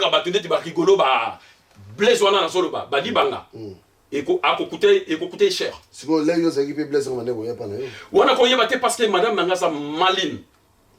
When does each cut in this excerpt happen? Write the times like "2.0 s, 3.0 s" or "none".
none